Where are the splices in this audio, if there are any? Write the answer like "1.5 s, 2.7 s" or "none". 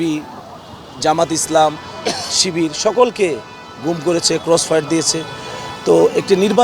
none